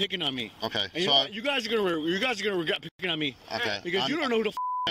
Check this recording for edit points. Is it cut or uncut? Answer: uncut